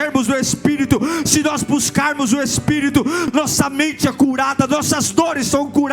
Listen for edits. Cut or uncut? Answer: cut